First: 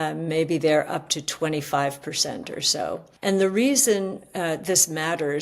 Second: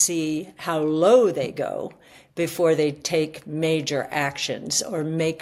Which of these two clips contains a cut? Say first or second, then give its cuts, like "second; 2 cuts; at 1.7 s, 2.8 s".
first; 1 cut; at 3.1 s